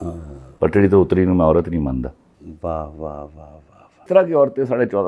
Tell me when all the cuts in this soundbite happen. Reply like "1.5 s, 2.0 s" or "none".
4.1 s